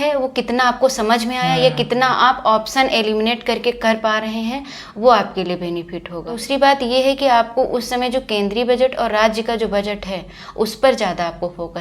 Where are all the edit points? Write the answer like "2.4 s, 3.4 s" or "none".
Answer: 6.4 s